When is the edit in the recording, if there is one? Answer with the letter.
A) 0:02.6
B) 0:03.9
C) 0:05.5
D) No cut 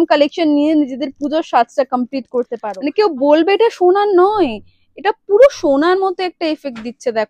A